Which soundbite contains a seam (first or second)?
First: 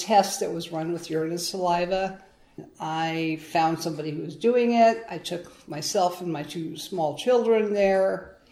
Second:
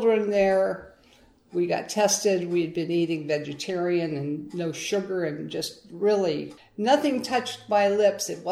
first